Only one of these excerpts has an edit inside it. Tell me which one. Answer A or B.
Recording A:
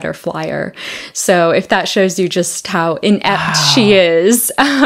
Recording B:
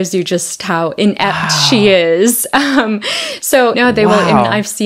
B